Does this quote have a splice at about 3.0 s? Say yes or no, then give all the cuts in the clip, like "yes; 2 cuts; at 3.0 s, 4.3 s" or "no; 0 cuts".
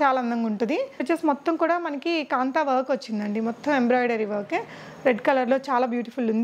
no; 1 cut; at 1.0 s